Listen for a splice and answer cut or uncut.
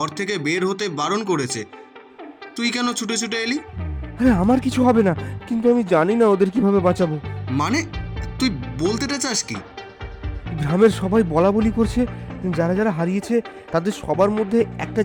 uncut